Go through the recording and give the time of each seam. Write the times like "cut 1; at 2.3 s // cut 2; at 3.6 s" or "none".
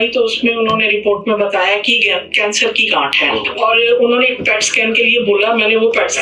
none

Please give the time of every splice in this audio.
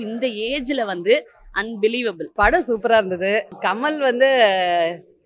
cut 1; at 2.3 s // cut 2; at 3.5 s

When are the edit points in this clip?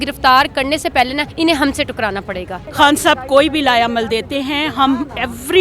cut 1; at 2.6 s

